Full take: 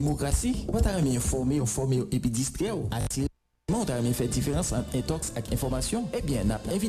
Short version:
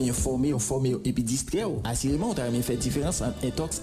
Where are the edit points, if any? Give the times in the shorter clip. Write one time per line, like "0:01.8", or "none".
0:01.9